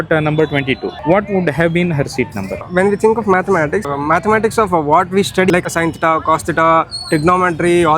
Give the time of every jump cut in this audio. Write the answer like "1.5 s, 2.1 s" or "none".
0.9 s, 2.6 s, 3.9 s, 5.5 s